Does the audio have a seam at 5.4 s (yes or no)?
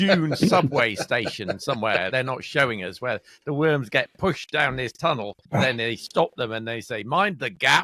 yes